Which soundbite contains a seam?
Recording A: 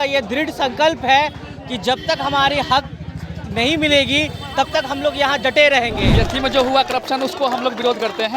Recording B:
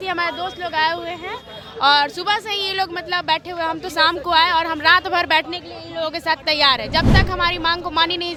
A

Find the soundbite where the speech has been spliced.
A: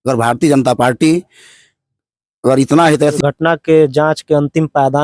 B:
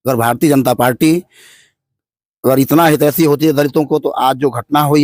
A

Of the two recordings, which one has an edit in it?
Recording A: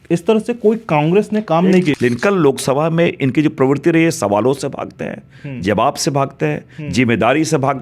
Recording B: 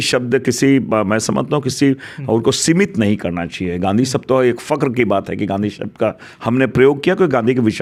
A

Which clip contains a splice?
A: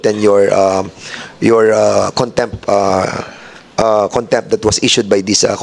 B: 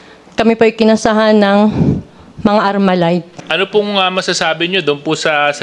B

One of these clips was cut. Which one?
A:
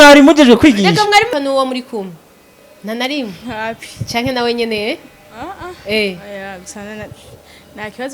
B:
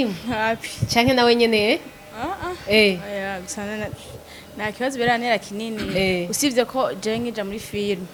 A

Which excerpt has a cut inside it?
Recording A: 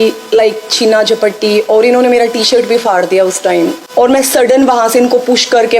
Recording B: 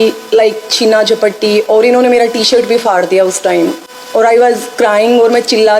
A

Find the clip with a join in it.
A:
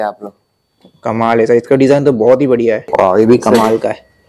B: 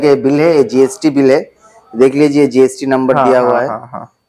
A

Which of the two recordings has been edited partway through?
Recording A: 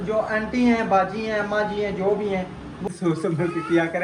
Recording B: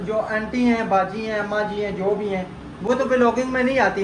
A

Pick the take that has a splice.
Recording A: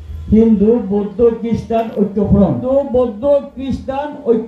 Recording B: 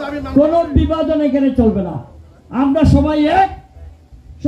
A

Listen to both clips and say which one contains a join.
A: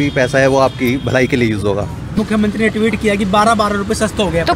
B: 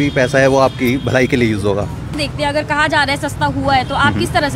A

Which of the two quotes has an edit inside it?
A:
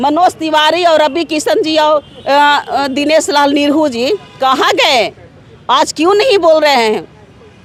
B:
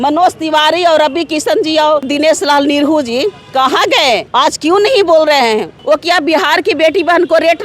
B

